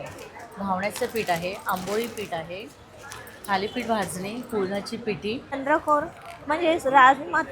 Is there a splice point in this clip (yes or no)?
yes